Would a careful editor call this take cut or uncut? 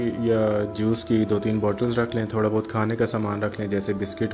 uncut